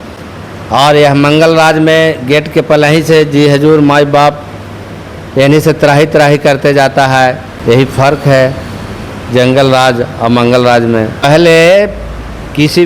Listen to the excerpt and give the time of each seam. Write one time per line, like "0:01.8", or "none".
0:07.5
0:11.2